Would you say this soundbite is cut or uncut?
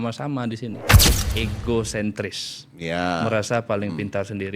cut